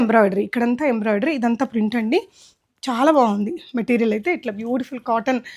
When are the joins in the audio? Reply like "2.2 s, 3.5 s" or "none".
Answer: none